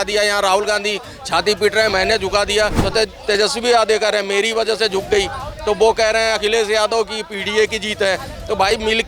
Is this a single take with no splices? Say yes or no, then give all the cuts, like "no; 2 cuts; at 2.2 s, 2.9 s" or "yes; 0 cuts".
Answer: no; 1 cut; at 2.8 s